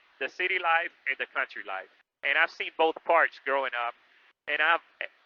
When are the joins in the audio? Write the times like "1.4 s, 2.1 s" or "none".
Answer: none